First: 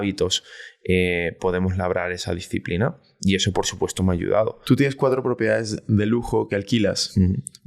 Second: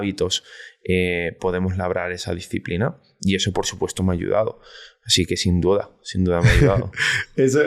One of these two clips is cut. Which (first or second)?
first